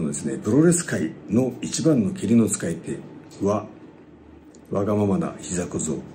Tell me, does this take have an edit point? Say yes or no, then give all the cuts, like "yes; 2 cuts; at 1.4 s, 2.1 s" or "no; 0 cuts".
no; 0 cuts